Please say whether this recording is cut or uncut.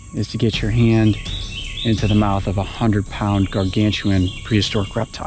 uncut